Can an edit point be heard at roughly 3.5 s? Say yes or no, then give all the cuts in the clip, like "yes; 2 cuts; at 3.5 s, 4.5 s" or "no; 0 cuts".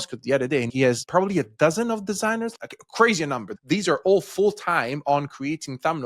yes; 3 cuts; at 0.9 s, 2.5 s, 3.5 s